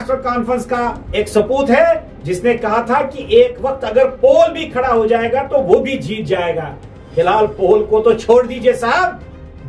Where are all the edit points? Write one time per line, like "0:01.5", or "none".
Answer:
0:01.0